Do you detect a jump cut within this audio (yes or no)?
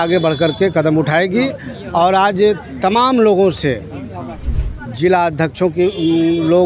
no